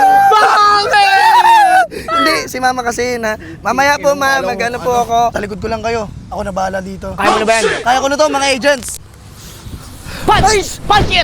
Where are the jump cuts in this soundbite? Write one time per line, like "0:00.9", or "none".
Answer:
0:05.3
0:09.1